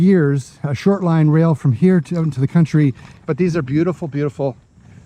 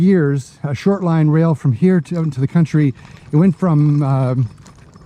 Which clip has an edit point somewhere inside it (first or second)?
first